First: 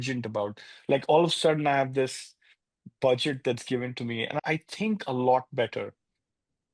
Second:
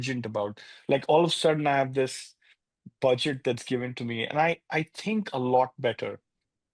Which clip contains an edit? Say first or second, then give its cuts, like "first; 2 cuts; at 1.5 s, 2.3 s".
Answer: first; 1 cut; at 4.4 s